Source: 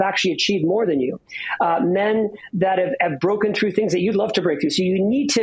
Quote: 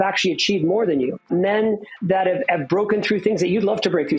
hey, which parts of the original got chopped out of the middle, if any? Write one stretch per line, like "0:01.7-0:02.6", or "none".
0:01.3-0:01.8